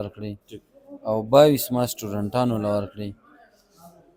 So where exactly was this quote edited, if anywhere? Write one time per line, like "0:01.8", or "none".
none